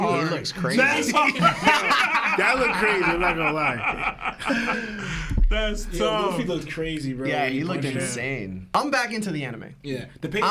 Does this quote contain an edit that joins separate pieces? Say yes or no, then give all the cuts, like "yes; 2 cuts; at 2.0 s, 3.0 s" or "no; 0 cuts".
yes; 1 cut; at 8.6 s